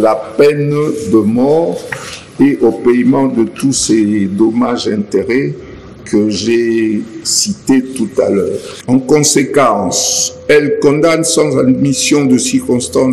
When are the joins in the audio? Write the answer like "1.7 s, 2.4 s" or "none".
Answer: 8.7 s